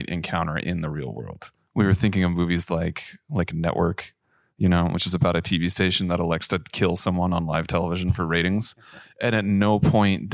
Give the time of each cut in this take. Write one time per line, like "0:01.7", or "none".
0:01.5